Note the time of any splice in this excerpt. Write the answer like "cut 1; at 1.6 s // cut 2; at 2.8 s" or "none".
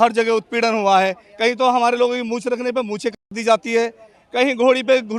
none